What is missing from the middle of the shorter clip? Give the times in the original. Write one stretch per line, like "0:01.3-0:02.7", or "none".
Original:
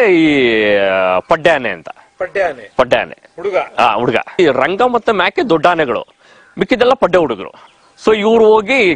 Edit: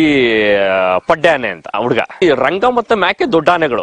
0:02.0-0:03.9